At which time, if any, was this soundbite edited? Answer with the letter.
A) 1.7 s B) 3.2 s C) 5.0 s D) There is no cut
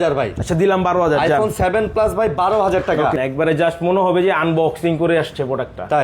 B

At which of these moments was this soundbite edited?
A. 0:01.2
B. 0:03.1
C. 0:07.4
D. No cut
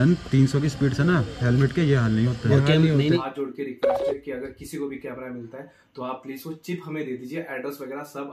B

